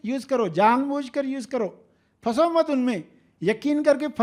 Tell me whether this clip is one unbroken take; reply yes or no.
yes